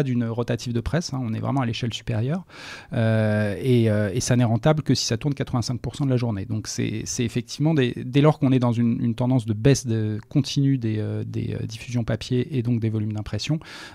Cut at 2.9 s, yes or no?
no